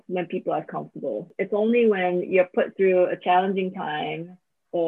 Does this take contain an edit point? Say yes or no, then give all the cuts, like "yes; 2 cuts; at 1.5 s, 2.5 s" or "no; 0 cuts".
yes; 1 cut; at 1.4 s